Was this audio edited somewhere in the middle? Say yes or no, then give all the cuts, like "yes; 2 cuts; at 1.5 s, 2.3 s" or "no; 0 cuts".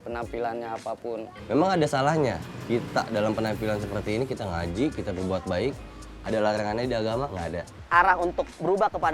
yes; 2 cuts; at 1.3 s, 7.7 s